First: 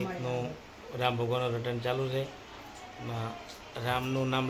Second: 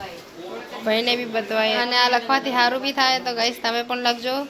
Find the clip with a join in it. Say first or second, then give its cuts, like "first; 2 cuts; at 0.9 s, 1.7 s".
second; 1 cut; at 1.8 s